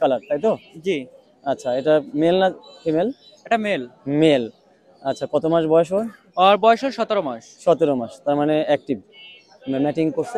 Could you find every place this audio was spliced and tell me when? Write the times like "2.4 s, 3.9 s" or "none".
none